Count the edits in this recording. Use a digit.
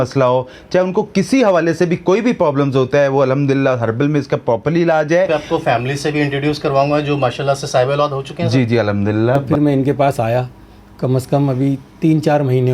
2